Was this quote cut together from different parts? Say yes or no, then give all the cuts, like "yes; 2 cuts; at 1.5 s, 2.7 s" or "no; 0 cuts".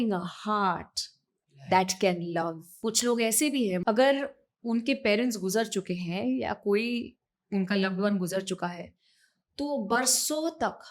yes; 2 cuts; at 2.8 s, 3.8 s